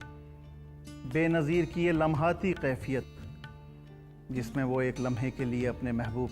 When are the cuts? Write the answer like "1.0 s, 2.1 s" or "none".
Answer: 1.0 s